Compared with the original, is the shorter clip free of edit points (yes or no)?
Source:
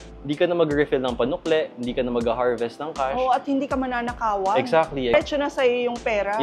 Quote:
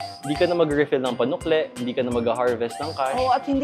yes